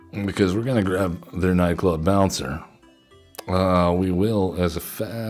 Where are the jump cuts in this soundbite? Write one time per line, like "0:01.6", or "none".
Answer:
none